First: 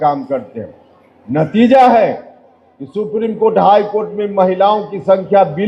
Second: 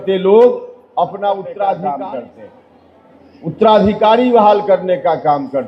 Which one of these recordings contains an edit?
second; 1 cut; at 1.5 s

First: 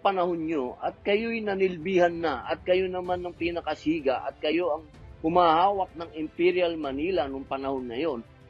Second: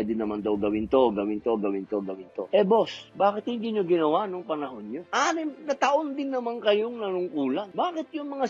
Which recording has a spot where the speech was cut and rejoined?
second; 3 cuts; at 2.3 s, 5.0 s, 7.7 s

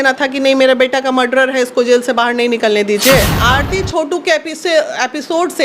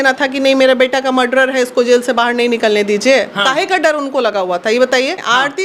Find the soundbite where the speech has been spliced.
first; 1 cut; at 3.3 s

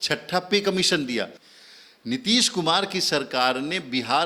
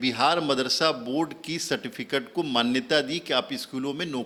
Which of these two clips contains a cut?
first; 1 cut; at 1.4 s

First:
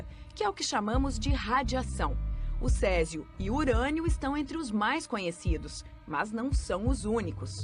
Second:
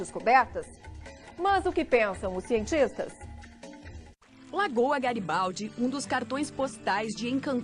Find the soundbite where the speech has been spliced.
first; 1 cut; at 5.2 s

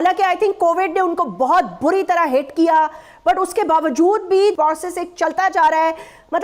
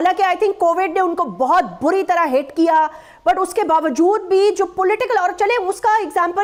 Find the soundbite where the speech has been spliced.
first; 1 cut; at 4.5 s

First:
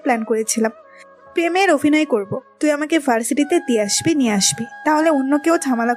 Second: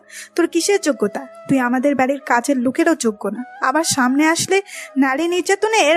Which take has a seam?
second; 1 cut; at 1.3 s

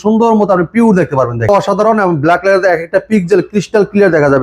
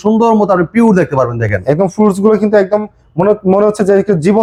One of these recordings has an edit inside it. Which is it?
first; 1 cut; at 1.5 s

